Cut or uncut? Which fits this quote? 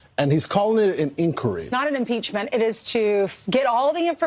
cut